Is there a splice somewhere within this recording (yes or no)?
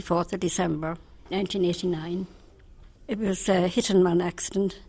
no